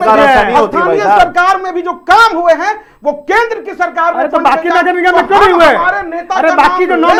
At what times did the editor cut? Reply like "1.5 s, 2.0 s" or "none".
none